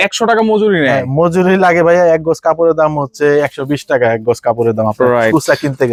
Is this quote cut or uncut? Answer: uncut